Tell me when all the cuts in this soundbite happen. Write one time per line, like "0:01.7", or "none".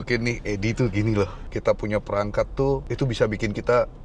0:01.4